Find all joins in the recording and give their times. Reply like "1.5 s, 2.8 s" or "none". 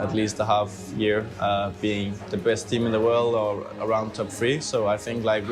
2.2 s